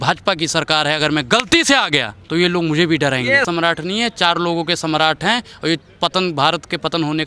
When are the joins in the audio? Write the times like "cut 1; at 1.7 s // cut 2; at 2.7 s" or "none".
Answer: cut 1; at 2.2 s // cut 2; at 3.5 s